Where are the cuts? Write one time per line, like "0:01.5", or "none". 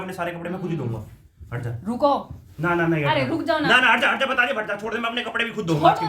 none